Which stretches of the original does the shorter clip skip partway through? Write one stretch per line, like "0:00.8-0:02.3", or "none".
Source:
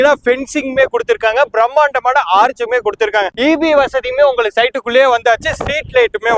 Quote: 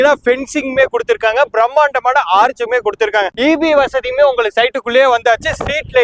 none